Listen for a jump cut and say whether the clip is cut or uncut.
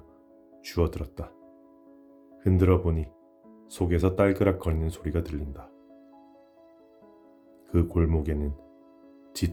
uncut